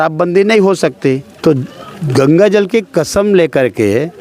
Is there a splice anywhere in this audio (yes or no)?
yes